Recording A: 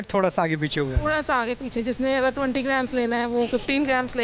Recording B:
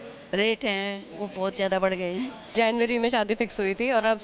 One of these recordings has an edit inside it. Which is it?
B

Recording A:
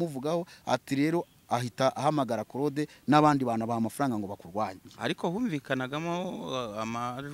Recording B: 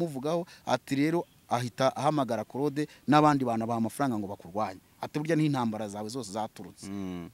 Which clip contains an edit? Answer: A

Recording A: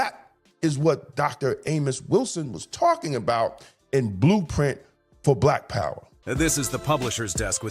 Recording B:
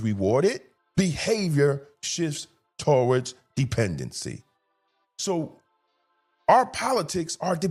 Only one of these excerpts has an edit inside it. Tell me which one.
A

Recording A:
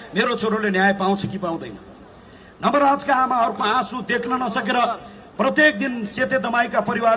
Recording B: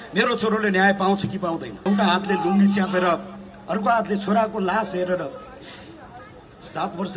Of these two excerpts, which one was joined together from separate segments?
B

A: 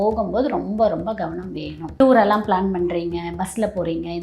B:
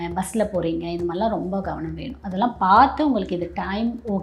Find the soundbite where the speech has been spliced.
A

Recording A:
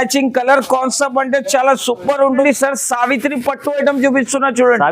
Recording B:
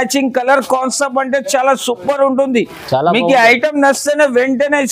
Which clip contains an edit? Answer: A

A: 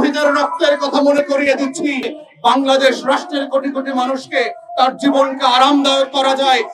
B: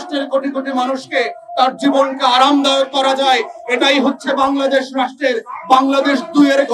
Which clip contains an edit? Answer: A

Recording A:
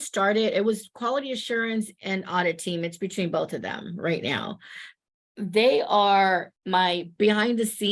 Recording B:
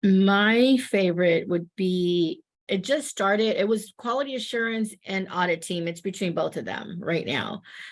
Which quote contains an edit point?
A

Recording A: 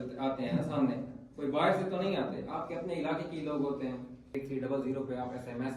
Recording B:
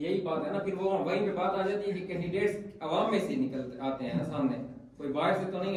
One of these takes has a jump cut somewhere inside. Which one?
A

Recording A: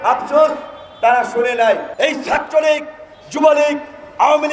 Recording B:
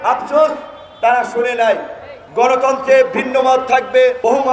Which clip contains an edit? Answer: A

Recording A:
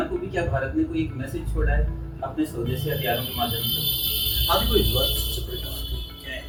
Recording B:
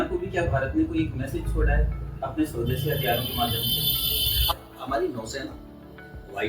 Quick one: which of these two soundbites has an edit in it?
B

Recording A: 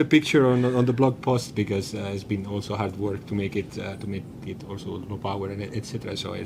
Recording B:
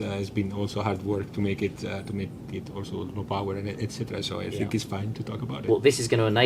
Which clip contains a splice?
B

